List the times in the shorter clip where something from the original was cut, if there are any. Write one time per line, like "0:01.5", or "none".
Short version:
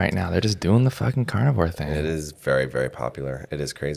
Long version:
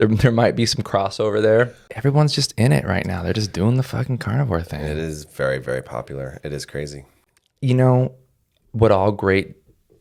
none

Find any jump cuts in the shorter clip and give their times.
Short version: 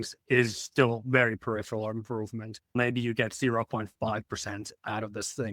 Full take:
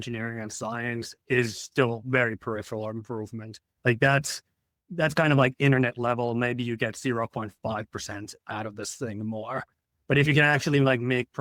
0:02.7

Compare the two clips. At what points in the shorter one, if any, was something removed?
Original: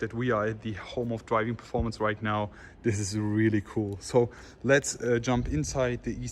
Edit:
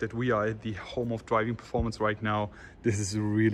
none

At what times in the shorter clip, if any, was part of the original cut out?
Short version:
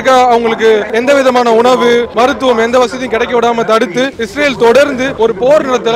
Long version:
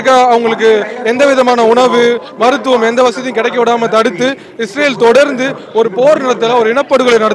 0:00.9
0:02.1
0:04.2
0:05.1

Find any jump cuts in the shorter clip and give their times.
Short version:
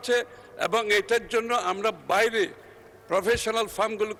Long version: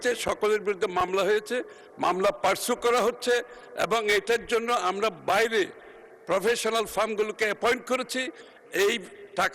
none

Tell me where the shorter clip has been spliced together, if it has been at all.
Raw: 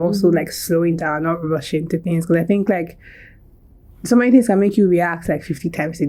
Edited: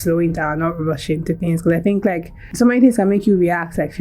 0:02.4

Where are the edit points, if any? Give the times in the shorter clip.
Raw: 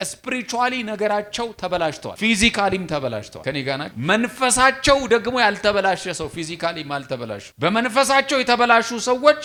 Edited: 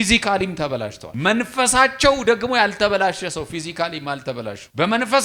0:01.0

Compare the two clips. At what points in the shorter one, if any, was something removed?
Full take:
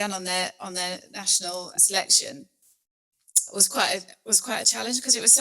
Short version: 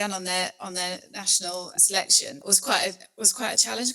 0:02.4

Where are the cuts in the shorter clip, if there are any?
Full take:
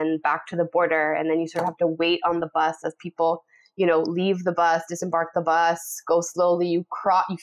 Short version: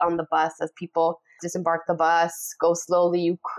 0:01.4

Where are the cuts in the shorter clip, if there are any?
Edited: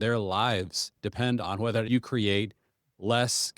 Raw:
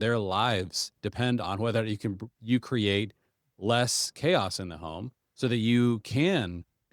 0:01.9

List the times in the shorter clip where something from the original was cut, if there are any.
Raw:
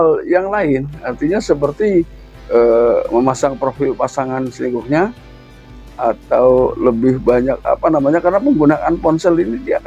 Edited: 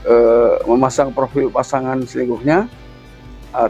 none

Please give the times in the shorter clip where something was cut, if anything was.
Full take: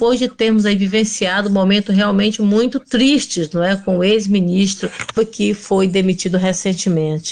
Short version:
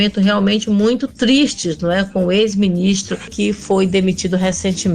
0:03.3

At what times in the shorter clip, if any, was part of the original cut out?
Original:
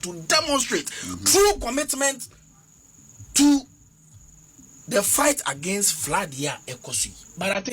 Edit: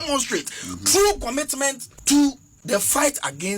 0:01.9
0:02.5

